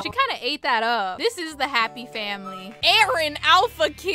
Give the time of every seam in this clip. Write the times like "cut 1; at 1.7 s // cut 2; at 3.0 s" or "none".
cut 1; at 2.8 s